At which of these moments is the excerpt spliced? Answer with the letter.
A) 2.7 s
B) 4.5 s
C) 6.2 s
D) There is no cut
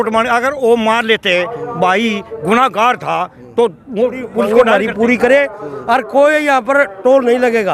B